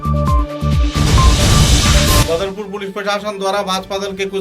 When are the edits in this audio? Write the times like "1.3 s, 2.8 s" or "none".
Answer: 2.2 s